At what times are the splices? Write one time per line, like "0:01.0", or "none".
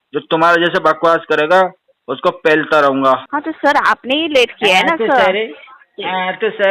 0:03.3

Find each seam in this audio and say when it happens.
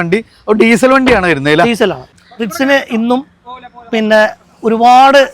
0:02.0

